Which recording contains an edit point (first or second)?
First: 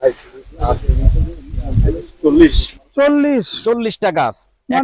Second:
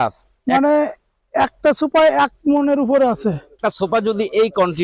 second